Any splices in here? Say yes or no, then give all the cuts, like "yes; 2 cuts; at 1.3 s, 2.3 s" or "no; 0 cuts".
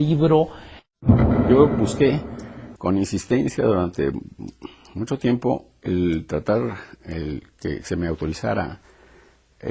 yes; 1 cut; at 4.2 s